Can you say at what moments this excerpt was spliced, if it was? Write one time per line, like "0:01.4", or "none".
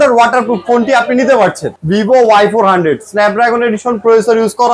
0:01.7